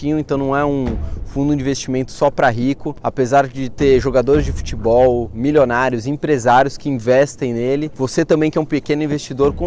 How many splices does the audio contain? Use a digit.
0